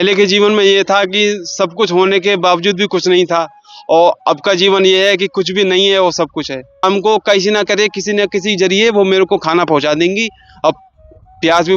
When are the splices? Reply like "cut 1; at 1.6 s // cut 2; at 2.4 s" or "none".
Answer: cut 1; at 6.8 s